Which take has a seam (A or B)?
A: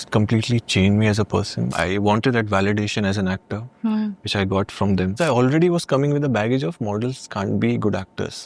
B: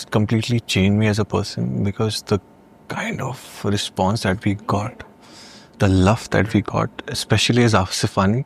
A